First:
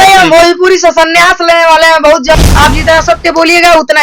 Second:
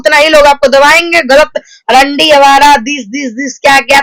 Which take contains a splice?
first; 1 cut; at 2.3 s

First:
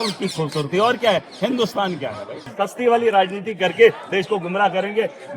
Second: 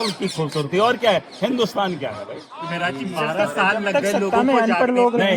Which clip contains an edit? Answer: first; 1 cut; at 2.4 s

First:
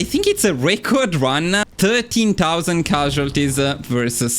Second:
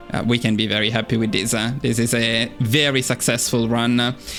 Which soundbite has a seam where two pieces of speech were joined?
first; 1 cut; at 1.7 s

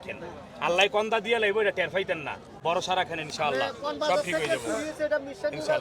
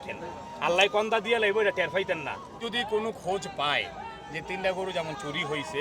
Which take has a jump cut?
second; 1 cut; at 2.5 s

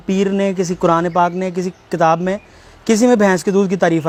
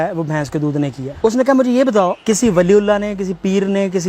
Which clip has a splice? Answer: second; 2 cuts; at 1.0 s, 2.2 s

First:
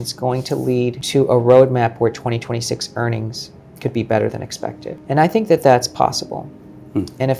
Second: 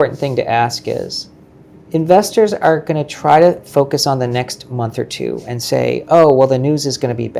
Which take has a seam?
first; 2 cuts; at 1.0 s, 4.9 s

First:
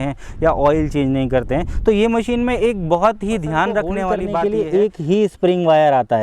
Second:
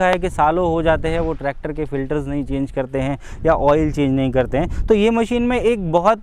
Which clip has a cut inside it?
first; 1 cut; at 4.2 s

